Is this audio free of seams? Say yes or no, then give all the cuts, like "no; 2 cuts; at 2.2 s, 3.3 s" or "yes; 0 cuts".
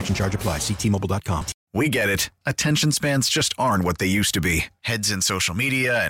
no; 1 cut; at 1.6 s